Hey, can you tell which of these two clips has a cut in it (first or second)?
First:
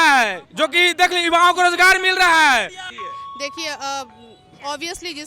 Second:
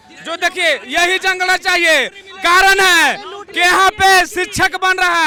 first